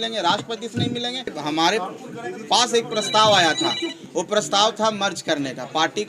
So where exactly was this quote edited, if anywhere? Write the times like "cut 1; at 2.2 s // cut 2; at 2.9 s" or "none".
cut 1; at 1.4 s